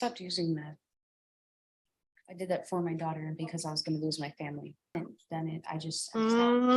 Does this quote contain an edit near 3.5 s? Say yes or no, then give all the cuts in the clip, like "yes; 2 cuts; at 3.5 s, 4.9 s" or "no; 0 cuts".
no; 1 cut; at 4.9 s